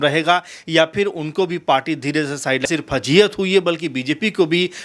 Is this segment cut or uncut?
cut